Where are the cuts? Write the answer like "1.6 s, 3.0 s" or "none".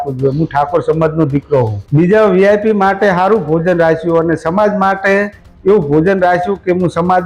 1.8 s